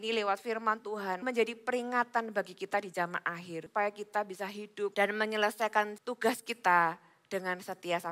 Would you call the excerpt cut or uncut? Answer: cut